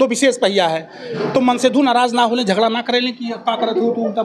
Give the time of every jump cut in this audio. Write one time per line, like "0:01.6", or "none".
none